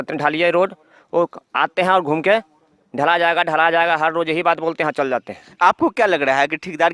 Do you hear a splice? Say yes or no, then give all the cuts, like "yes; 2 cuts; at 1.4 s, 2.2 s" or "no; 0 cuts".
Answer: no; 0 cuts